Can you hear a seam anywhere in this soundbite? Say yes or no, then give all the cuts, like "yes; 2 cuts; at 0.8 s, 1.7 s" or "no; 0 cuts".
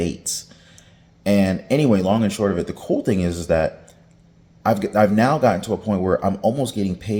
no; 0 cuts